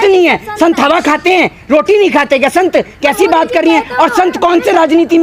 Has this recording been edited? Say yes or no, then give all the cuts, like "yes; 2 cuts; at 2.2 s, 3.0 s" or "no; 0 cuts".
no; 0 cuts